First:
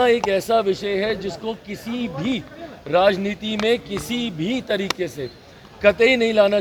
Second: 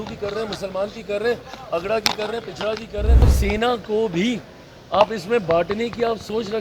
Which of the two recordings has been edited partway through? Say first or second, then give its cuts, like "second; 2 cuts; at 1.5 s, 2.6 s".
second; 1 cut; at 3.2 s